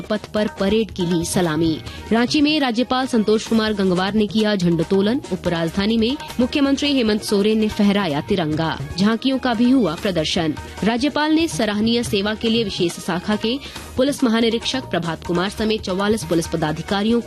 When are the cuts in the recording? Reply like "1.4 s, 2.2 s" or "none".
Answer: 1.9 s, 6.2 s, 8.8 s, 10.7 s